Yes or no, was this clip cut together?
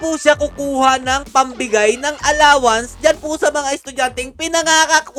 no